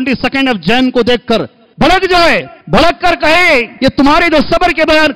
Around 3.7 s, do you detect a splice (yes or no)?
yes